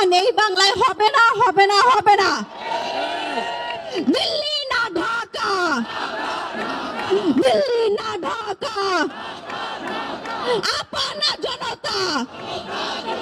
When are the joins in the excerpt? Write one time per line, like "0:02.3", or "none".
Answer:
none